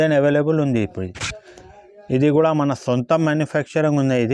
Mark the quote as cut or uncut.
uncut